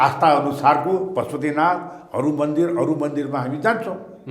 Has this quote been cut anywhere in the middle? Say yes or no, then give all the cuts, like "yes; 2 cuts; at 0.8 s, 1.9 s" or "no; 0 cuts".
no; 0 cuts